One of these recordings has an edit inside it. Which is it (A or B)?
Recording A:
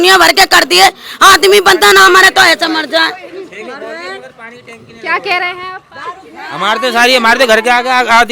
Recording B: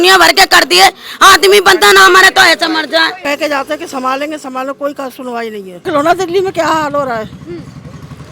B